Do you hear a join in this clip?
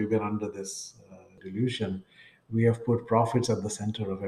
yes; 1 cut; at 1.4 s

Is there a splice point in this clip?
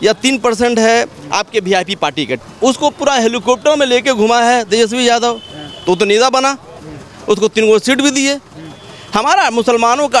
yes; 1 cut; at 2.5 s

